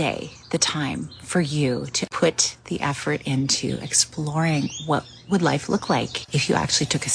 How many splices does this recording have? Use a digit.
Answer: 2